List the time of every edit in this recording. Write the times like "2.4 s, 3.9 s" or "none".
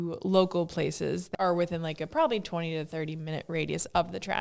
1.2 s